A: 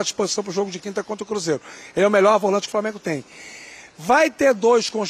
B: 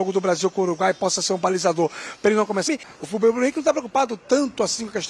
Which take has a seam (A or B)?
B